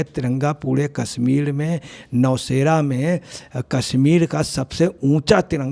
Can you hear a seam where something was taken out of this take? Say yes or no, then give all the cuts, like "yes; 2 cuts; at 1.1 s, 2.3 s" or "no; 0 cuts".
no; 0 cuts